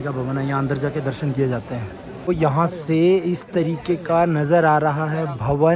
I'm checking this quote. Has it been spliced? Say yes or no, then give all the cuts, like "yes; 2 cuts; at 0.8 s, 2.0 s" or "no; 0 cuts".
yes; 1 cut; at 2.3 s